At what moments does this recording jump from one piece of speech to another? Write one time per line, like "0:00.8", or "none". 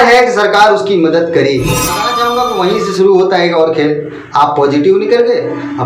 0:02.2